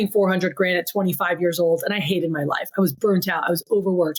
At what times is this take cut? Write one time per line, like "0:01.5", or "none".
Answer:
none